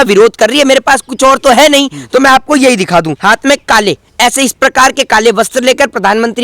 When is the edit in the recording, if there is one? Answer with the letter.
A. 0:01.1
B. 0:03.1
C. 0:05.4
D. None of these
B